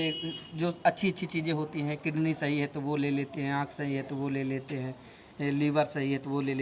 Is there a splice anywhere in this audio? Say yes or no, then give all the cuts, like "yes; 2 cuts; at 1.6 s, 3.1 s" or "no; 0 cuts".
no; 0 cuts